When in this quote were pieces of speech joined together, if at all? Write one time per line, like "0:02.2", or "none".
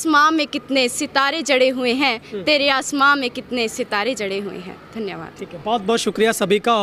none